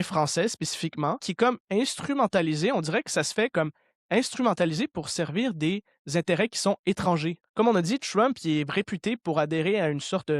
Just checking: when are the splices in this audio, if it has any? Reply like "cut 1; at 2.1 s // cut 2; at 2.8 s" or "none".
cut 1; at 1.3 s // cut 2; at 7.4 s